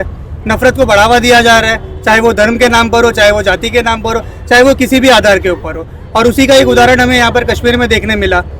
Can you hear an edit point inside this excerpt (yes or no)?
no